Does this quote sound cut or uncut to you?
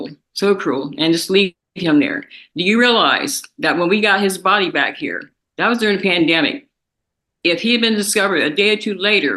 uncut